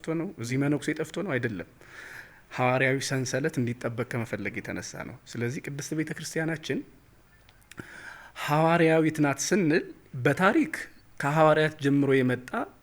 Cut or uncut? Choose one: uncut